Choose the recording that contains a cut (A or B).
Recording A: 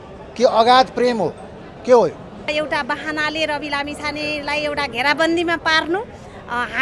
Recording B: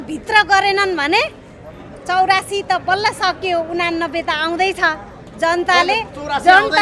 A